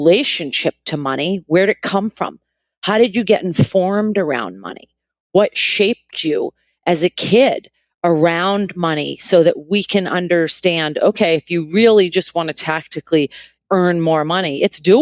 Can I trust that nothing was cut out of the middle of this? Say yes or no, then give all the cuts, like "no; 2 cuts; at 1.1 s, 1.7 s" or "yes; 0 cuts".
yes; 0 cuts